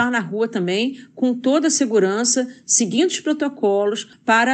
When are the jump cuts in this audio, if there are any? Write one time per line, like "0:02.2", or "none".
none